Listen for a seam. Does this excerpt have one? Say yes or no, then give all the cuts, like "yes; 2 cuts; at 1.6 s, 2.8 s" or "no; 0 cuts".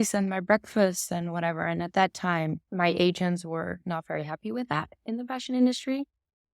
yes; 1 cut; at 2.6 s